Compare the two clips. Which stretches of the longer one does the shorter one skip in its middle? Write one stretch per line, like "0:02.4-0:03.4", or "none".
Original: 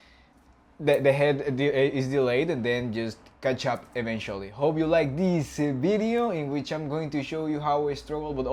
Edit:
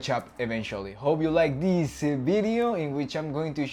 none